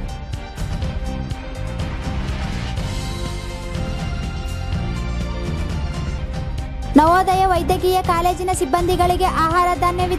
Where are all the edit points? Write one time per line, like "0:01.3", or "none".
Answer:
none